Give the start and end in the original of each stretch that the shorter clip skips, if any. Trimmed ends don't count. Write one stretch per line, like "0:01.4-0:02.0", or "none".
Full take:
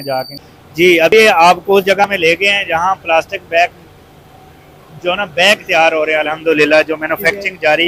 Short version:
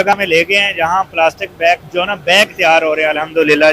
0:03.8-0:05.0

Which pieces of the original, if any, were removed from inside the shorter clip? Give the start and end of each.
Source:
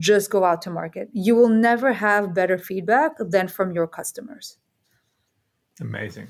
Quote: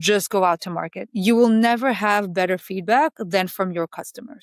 none

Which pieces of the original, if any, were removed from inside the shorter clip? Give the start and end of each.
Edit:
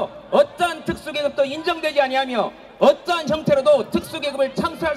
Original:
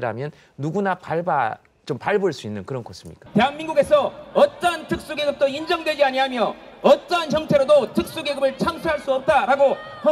none

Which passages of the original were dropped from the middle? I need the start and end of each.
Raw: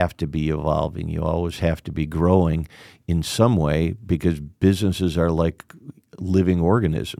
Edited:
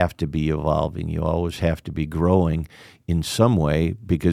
none

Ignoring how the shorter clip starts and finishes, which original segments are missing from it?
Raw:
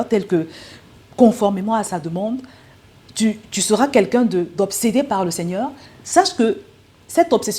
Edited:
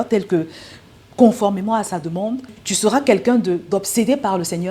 0:02.6-0:03.5

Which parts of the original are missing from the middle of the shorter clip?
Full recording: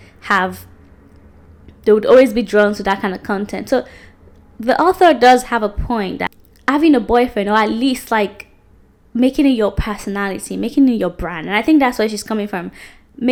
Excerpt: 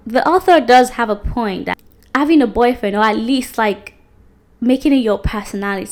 none

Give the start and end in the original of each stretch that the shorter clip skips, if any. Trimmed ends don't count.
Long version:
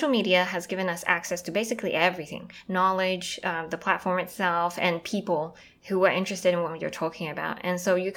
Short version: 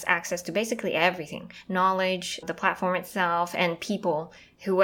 0:03.4-0:03.6

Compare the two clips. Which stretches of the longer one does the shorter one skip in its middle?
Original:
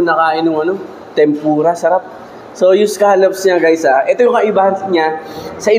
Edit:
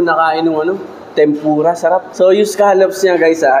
0:02.1-0:02.5

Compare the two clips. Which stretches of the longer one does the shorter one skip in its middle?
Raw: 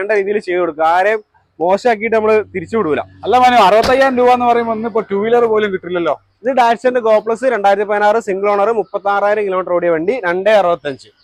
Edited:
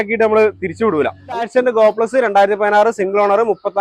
0:03.3-0:06.7

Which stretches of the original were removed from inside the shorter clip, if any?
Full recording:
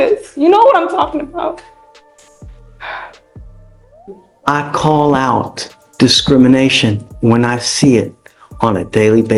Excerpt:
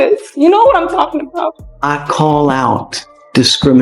0:01.7-0:04.3

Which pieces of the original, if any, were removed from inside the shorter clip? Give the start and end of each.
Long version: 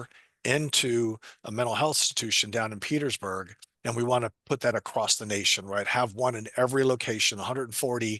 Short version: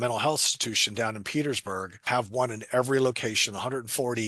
0:03.6-0:05.9

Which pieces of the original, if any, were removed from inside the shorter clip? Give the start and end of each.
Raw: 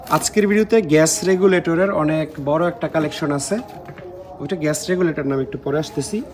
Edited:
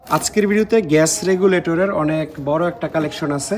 none

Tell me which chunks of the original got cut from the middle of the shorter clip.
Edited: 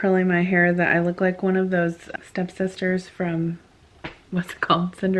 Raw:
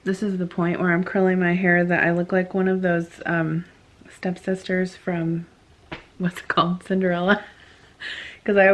0:03.2-0:03.9

